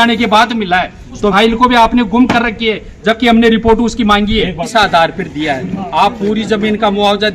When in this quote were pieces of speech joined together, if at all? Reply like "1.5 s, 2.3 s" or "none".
1.3 s, 4.6 s